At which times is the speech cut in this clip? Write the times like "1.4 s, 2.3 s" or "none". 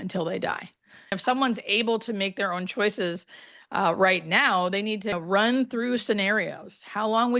1.1 s, 5.2 s